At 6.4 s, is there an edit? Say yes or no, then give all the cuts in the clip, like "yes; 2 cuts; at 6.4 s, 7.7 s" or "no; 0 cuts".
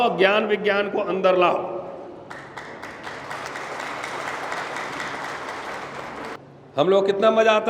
yes; 1 cut; at 6.4 s